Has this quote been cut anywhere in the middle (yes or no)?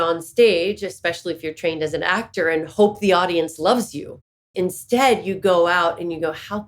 yes